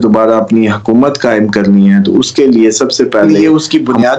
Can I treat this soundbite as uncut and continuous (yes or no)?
no